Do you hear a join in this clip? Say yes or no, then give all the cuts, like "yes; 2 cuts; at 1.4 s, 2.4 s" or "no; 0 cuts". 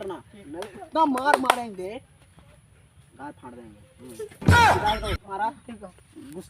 yes; 1 cut; at 5.3 s